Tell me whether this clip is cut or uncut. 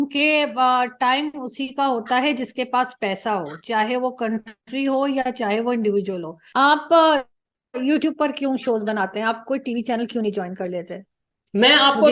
cut